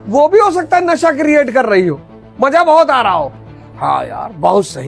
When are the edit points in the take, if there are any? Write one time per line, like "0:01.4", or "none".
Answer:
none